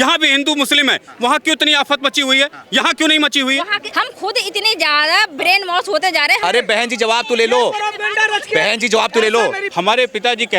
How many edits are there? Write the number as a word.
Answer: three